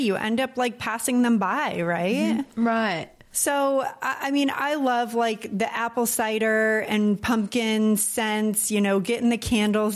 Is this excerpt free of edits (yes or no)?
no